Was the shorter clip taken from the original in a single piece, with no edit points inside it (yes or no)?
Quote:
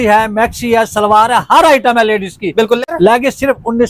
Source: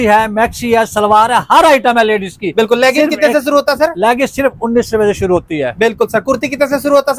no